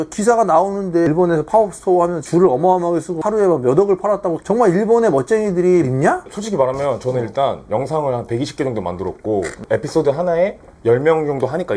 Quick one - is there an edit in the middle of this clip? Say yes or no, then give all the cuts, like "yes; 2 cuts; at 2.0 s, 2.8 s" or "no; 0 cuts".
yes; 1 cut; at 1.1 s